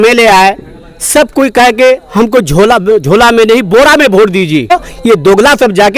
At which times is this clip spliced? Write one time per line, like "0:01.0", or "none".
0:04.7